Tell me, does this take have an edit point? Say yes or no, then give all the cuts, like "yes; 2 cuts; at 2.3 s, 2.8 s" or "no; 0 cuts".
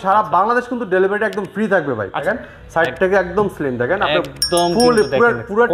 yes; 1 cut; at 2.2 s